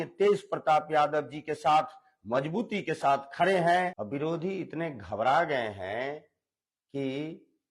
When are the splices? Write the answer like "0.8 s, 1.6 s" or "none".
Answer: 4.0 s